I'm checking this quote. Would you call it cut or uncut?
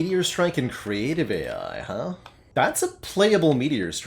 cut